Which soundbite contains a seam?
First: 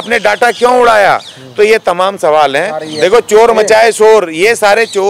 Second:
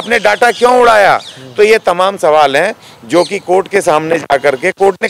first; 1 cut; at 2.8 s

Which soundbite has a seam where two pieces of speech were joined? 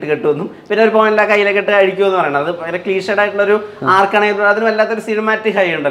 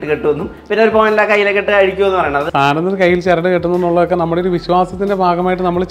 second; 1 cut; at 2.5 s

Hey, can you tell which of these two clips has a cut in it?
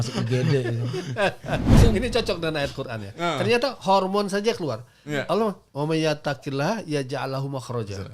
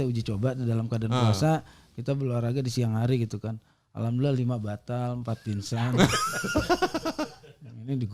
first; 1 cut; at 1.8 s

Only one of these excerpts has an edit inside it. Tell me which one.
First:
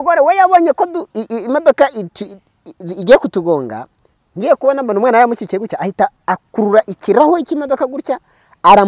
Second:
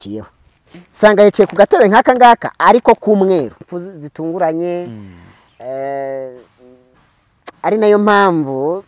second; 1 cut; at 3.6 s

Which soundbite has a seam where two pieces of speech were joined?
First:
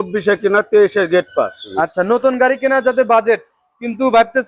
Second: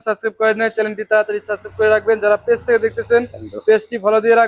first; 1 cut; at 1.7 s

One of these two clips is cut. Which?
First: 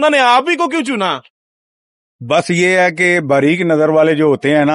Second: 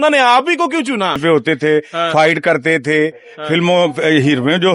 second; 1 cut; at 1.2 s

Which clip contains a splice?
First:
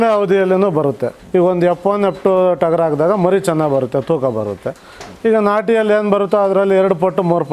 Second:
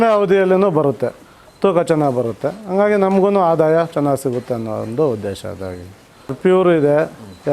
first; 1 cut; at 1.1 s

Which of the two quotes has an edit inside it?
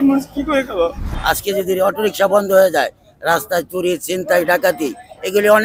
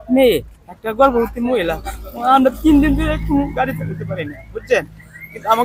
first; 1 cut; at 1.1 s

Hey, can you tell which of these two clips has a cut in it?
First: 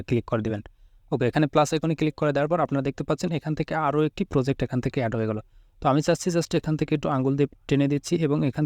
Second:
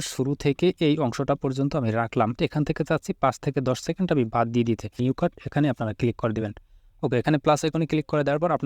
second; 2 cuts; at 2.4 s, 5.0 s

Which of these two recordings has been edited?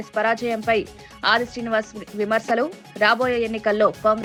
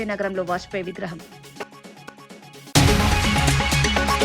second; 1 cut; at 2.1 s

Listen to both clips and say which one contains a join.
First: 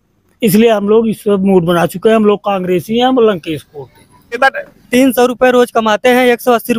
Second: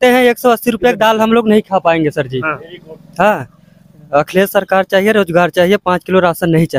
first; 1 cut; at 4.4 s

